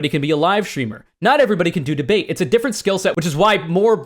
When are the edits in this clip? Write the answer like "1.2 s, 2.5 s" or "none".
3.2 s